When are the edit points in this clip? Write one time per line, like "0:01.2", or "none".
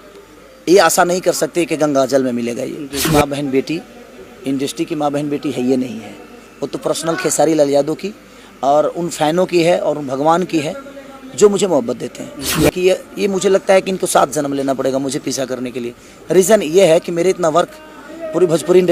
0:03.1
0:12.6